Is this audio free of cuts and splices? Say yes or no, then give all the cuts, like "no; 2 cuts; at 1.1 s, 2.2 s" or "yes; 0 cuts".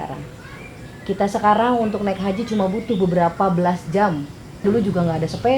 no; 1 cut; at 4.6 s